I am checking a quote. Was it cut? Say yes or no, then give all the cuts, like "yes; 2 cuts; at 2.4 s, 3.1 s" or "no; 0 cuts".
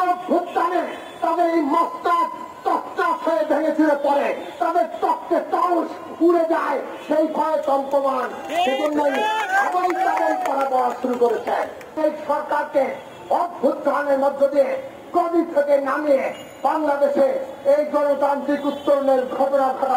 yes; 1 cut; at 12.0 s